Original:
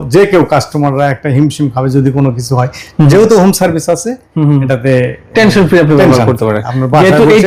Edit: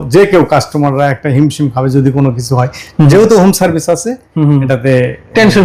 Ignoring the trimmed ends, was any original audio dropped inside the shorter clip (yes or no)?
no